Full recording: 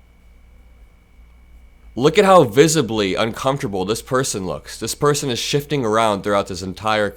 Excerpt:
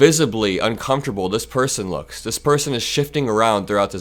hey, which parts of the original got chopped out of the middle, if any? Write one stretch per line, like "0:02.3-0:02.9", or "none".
none